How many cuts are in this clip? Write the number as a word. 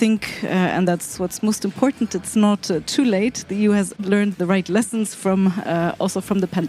one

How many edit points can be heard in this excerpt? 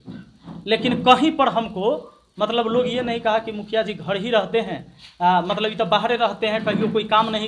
zero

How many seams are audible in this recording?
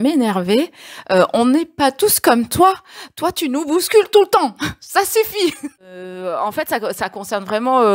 one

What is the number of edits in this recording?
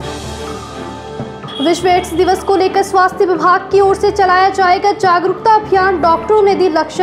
one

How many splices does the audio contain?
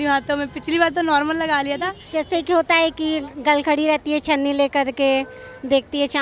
one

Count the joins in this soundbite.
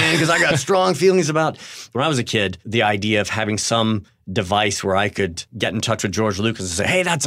four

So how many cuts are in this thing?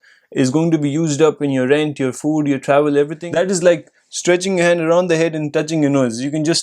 one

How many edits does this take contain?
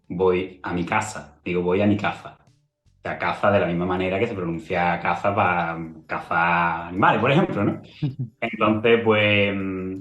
zero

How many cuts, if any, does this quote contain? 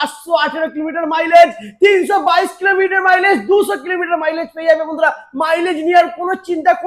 zero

